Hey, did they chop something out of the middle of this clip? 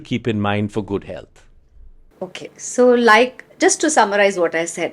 no; 0 cuts

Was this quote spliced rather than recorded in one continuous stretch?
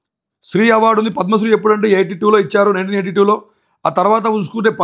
no; 0 cuts

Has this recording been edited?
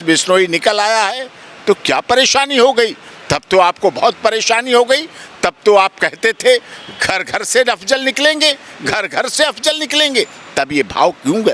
no; 0 cuts

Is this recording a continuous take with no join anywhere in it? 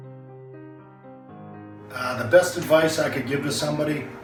yes; 0 cuts

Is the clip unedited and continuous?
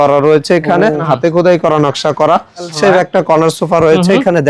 no; 2 cuts; at 1.0 s, 2.7 s

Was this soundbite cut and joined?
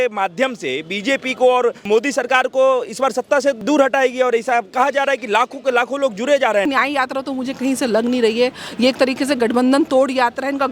yes; 3 cuts; at 1.9 s, 3.6 s, 6.7 s

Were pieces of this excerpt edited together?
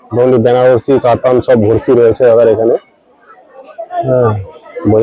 no; 0 cuts

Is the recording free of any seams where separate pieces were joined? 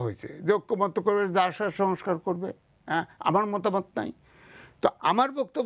yes; 0 cuts

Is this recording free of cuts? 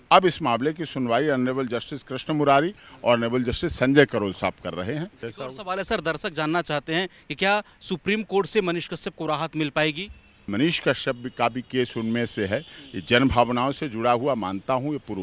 no; 2 cuts; at 5.2 s, 10.5 s

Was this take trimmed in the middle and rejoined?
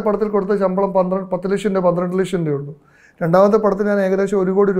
no; 0 cuts

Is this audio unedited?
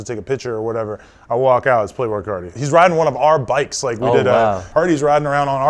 no; 1 cut; at 2.5 s

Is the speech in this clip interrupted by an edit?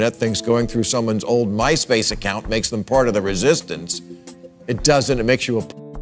no; 0 cuts

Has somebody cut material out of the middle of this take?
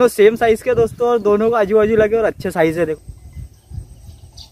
yes; 1 cut; at 2.9 s

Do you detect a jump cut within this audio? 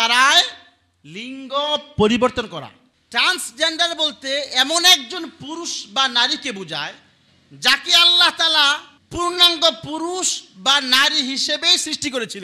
no; 0 cuts

